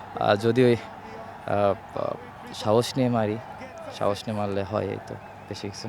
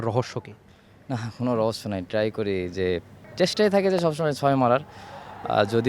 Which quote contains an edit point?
second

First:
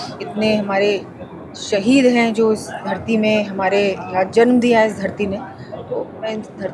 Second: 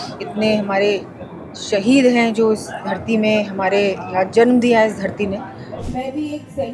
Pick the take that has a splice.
second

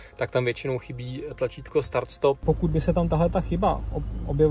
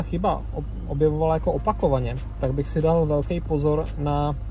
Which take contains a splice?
first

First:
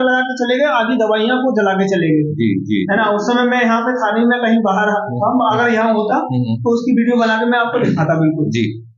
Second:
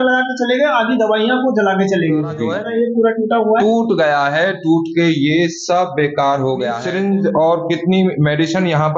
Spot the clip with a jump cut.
second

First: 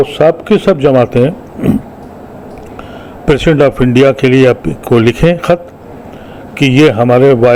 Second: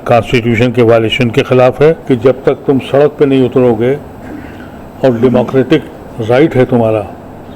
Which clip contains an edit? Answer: second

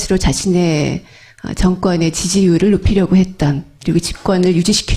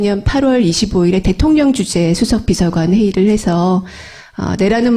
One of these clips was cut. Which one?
first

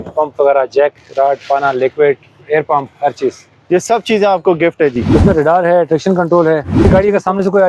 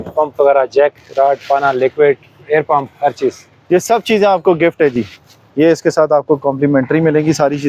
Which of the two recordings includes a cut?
first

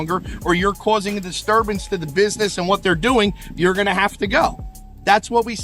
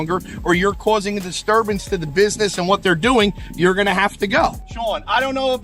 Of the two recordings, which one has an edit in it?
second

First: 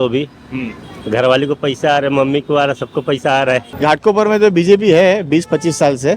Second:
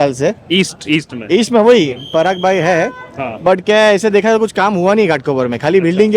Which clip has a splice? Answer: first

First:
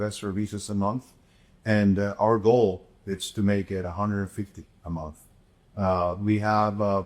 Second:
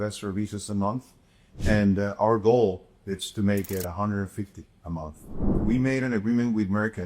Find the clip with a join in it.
second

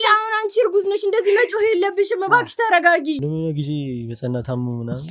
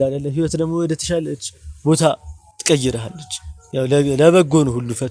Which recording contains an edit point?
first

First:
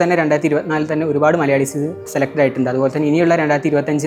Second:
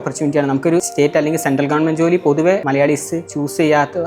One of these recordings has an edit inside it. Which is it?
second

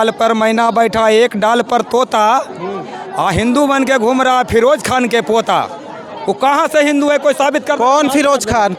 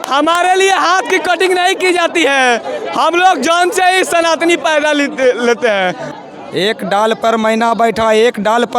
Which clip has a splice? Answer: second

